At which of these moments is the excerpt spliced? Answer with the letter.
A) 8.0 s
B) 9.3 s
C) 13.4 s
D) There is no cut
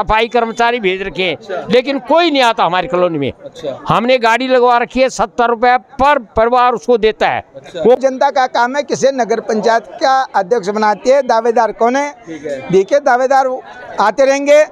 A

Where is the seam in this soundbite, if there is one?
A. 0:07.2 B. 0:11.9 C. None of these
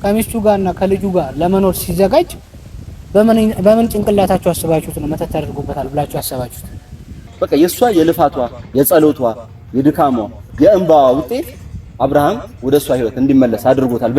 A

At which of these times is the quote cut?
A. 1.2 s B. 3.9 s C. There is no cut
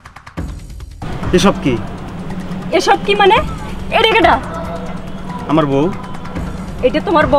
A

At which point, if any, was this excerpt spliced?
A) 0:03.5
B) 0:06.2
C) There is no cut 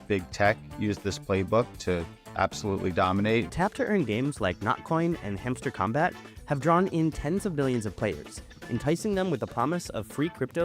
A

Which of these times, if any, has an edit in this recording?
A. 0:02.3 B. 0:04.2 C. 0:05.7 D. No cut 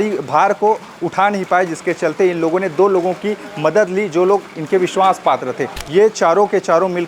C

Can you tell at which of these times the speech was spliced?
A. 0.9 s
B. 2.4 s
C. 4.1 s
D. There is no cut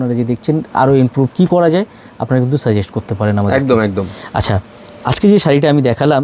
D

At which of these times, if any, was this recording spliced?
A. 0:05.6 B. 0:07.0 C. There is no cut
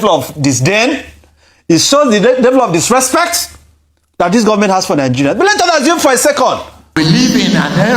B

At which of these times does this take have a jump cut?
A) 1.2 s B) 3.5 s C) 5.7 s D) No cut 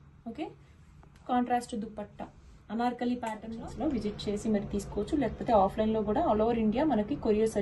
B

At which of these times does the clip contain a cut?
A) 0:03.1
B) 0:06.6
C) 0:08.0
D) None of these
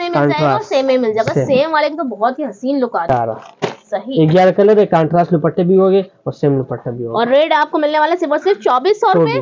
A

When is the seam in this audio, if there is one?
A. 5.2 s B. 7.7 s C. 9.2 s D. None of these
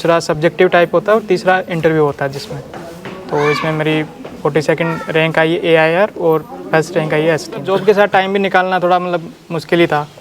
B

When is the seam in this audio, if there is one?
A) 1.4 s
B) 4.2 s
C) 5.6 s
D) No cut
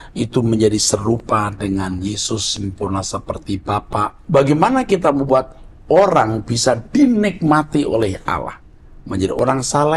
B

